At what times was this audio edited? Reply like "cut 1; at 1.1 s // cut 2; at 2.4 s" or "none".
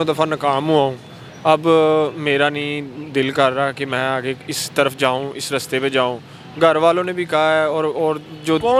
none